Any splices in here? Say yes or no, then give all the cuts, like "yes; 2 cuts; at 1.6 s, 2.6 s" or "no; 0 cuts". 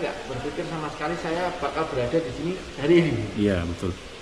no; 0 cuts